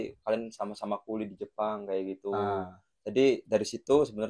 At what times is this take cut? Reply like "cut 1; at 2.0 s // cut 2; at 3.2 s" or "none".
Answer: none